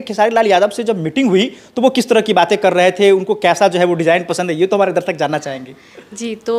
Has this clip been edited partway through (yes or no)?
no